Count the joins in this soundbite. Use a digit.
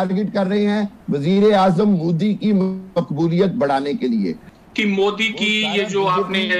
1